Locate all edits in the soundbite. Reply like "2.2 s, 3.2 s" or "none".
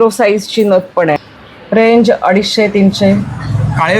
1.2 s